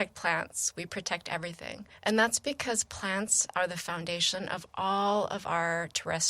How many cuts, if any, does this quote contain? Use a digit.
1